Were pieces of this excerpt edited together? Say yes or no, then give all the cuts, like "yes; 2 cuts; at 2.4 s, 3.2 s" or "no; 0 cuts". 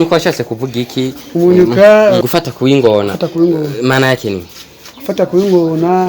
yes; 1 cut; at 2.2 s